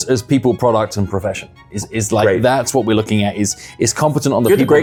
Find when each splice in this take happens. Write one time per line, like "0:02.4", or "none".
none